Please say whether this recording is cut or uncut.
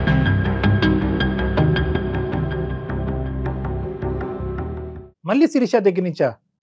uncut